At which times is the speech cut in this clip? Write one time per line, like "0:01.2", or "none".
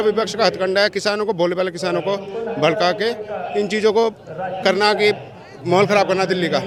none